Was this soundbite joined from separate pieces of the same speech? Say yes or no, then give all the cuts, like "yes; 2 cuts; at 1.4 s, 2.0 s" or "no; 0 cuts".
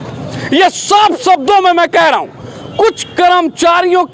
no; 0 cuts